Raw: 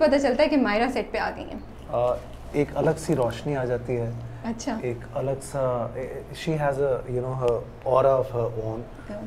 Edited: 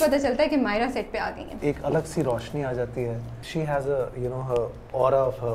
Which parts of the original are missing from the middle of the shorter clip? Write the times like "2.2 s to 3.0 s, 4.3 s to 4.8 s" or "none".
1.5 s to 2.4 s, 4.3 s to 6.3 s